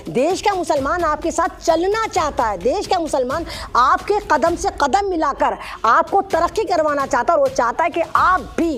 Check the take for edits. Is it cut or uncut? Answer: uncut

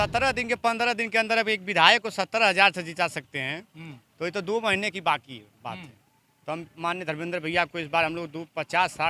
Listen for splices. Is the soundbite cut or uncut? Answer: uncut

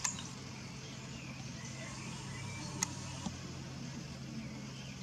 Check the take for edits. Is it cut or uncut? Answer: uncut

